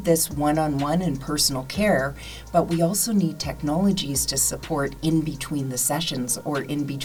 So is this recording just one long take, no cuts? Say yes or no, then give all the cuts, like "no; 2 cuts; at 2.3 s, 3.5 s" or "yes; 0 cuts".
yes; 0 cuts